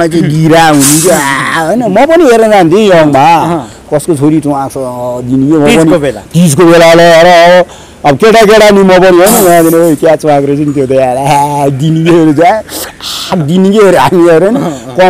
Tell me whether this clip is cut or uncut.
uncut